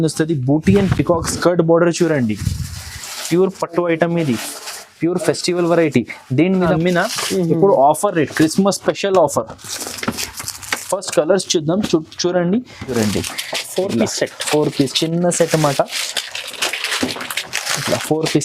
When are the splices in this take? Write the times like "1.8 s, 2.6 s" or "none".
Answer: 6.7 s, 12.9 s